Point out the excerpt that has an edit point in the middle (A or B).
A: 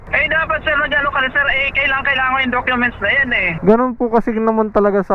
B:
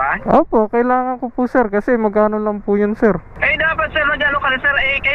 A